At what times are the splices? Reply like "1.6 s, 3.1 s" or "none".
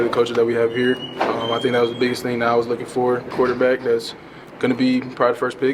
3.3 s